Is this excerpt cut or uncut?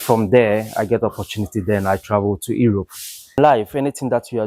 cut